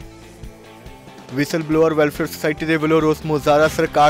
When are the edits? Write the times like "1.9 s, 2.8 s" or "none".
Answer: 1.1 s

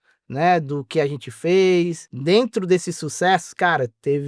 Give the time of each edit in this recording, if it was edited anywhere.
2.1 s

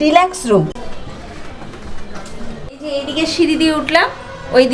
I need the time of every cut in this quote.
0.7 s, 2.7 s

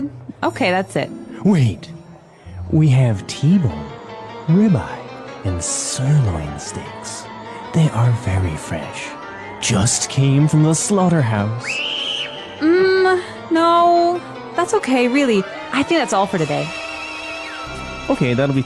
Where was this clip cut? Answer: 17.7 s

